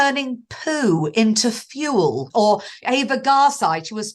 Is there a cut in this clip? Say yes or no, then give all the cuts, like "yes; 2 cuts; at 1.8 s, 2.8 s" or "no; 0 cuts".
yes; 1 cut; at 2.5 s